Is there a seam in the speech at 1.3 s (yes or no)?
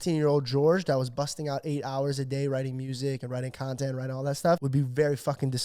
no